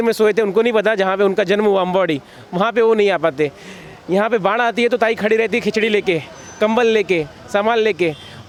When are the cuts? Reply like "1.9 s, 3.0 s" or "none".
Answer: none